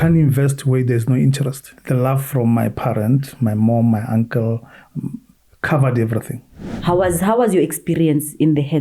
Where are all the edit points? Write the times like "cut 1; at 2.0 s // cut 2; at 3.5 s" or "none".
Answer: cut 1; at 1.7 s // cut 2; at 6.7 s